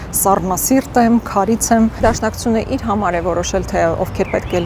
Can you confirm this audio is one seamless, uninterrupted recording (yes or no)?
no